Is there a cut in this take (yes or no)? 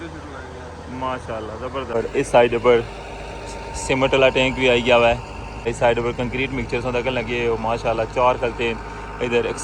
yes